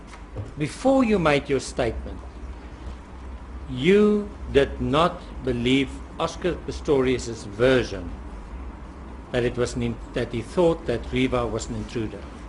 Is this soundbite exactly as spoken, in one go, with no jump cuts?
no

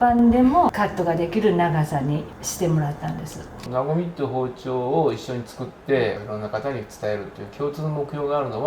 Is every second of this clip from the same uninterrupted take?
no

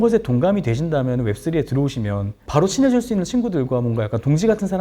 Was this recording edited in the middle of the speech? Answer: yes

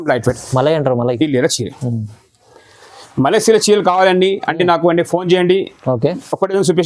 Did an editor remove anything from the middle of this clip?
no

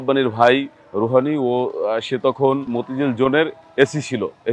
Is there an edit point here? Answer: yes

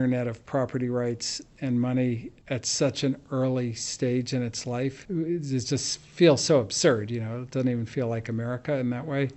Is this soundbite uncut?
no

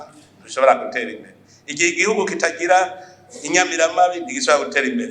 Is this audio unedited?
yes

